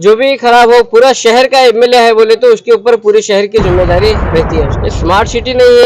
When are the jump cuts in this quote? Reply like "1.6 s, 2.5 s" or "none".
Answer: 4.8 s